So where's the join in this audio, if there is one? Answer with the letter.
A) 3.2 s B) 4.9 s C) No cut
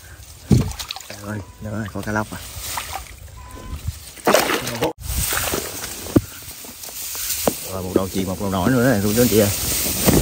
B